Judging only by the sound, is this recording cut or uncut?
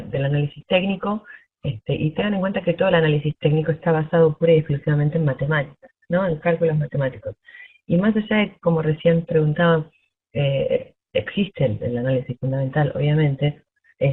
uncut